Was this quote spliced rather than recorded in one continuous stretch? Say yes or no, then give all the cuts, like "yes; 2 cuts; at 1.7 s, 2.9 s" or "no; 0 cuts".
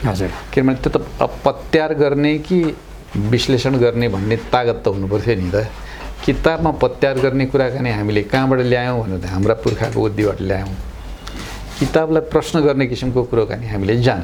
no; 0 cuts